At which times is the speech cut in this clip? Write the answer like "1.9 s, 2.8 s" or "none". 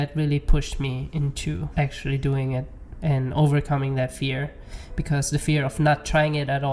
none